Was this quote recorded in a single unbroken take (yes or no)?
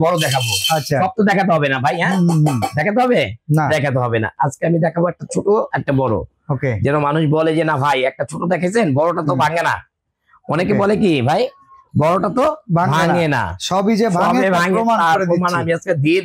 yes